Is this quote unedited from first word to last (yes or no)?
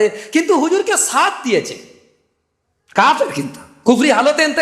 yes